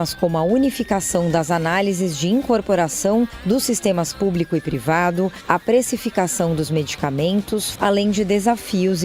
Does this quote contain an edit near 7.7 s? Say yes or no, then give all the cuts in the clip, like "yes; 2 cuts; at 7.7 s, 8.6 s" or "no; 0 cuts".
yes; 1 cut; at 7.7 s